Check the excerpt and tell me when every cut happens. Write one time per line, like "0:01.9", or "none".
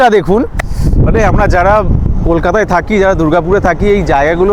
none